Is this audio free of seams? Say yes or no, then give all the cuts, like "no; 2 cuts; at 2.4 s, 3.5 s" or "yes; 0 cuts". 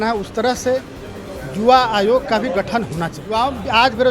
no; 1 cut; at 3.2 s